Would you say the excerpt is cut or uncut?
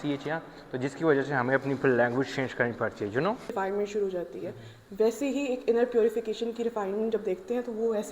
cut